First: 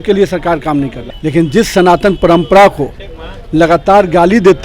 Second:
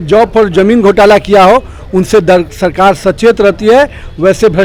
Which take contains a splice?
first; 1 cut; at 1.0 s

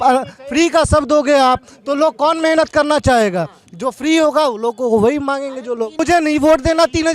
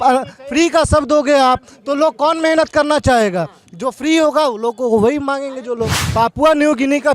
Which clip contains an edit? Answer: second; 1 cut; at 5.9 s

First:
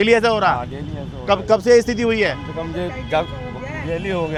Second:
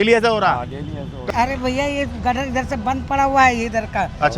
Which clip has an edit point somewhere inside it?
second; 1 cut; at 1.1 s

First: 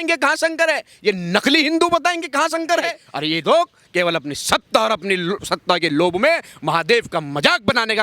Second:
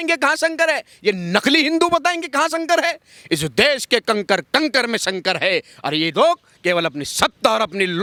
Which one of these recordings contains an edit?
first; 1 cut; at 3.1 s

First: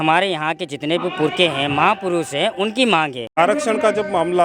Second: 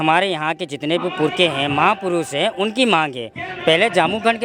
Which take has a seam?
first; 1 cut; at 3.3 s

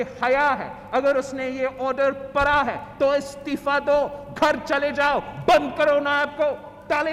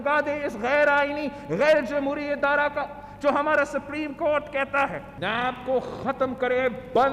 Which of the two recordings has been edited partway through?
second; 1 cut; at 5.2 s

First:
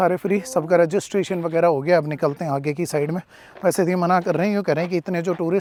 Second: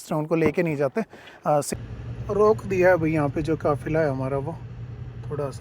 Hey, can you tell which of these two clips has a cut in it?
second; 1 cut; at 1.7 s

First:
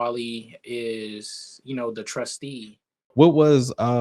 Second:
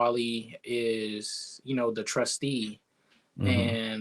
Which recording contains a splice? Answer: first; 1 cut; at 3.1 s

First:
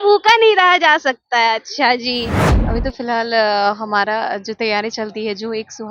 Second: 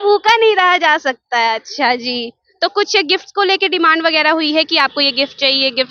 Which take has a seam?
first; 1 cut; at 2.4 s

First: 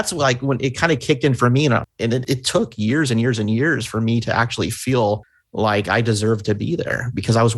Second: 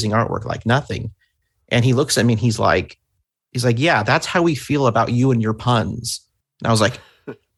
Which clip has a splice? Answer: first; 2 cuts; at 2.2 s, 5.4 s

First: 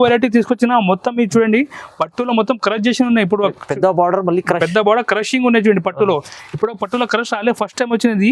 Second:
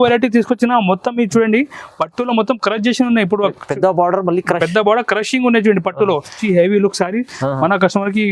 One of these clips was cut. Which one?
second; 1 cut; at 6.4 s

